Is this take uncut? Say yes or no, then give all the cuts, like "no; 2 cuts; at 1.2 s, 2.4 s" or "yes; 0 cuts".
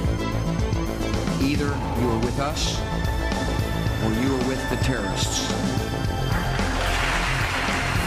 yes; 0 cuts